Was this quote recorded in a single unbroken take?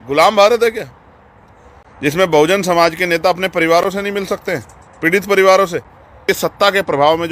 no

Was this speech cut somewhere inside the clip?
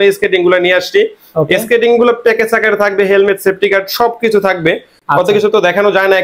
no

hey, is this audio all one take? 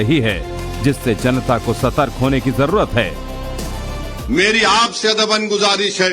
no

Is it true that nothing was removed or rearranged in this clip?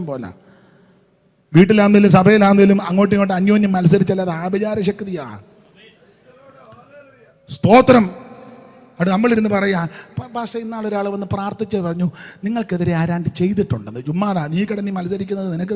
yes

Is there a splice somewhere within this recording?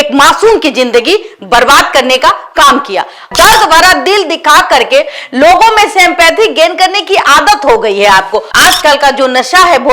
yes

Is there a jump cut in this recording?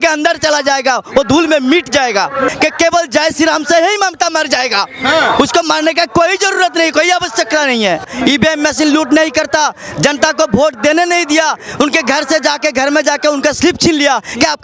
yes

